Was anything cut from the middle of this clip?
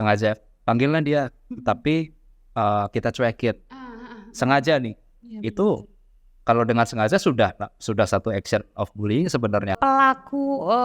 yes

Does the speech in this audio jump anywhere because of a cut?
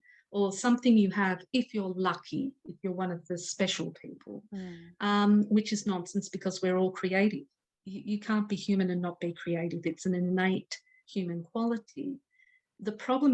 no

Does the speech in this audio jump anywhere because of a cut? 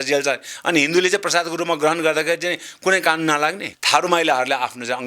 yes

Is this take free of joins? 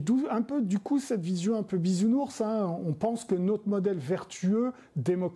yes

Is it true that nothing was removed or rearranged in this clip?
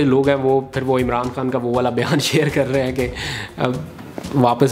yes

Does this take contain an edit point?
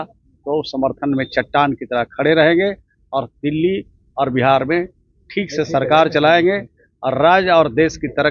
no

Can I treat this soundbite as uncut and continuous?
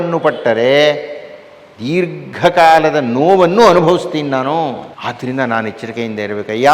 no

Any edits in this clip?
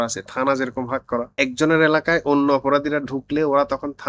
yes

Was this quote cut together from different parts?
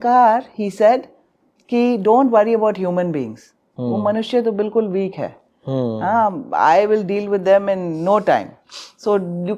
no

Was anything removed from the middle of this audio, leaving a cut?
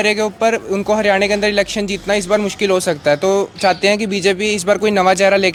no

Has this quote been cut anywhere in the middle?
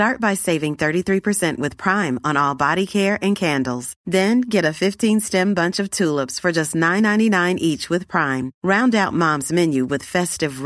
no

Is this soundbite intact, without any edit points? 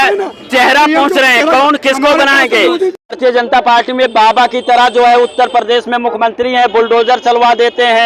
no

